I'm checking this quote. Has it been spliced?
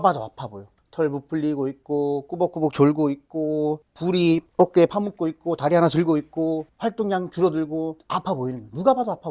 no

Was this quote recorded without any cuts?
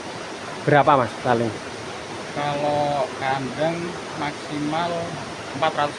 yes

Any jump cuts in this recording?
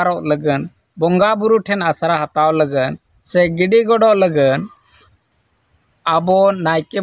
no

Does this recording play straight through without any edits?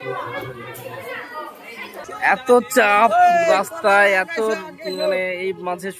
no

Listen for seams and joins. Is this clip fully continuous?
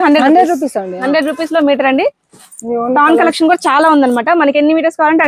yes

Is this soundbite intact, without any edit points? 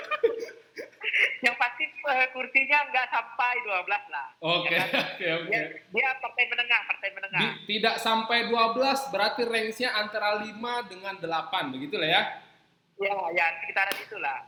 yes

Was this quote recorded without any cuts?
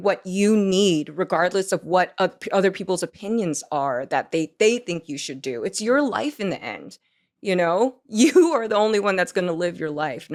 yes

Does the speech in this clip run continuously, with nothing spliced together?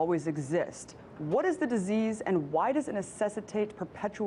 yes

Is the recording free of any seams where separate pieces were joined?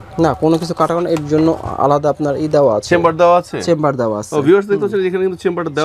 yes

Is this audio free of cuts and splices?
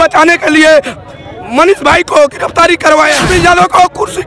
no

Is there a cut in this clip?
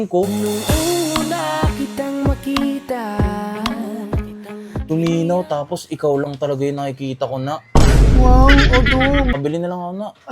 yes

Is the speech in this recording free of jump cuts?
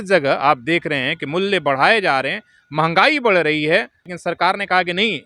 no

